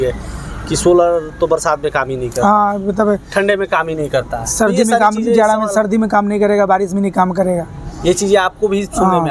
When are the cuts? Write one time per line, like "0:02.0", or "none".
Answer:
none